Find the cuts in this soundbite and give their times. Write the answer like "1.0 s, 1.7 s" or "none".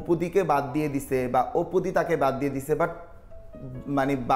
none